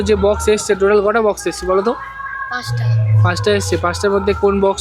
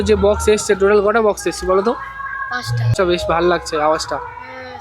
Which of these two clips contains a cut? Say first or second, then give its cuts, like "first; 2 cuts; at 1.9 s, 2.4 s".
second; 1 cut; at 2.9 s